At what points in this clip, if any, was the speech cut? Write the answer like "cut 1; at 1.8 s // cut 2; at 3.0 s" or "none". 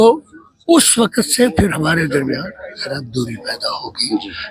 none